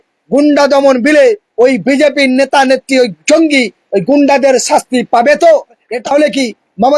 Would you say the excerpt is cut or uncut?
cut